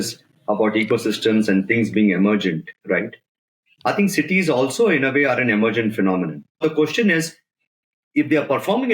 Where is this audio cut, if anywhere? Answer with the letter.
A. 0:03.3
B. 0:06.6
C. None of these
B